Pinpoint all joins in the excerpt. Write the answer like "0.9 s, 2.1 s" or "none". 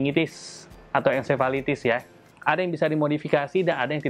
2.2 s